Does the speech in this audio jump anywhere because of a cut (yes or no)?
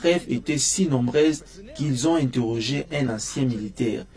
no